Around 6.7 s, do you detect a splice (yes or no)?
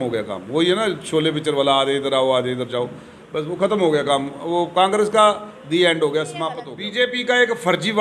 yes